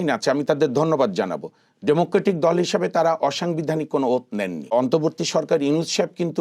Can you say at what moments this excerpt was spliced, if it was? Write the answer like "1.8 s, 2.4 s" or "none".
4.6 s